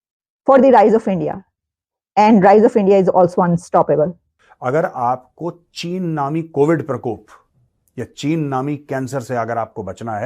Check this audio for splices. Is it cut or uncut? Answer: cut